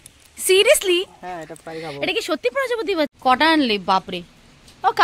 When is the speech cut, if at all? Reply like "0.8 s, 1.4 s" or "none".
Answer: 3.2 s